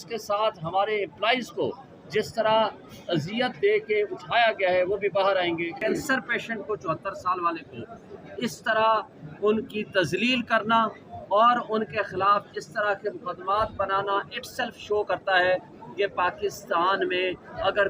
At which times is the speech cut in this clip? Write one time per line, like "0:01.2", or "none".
0:05.7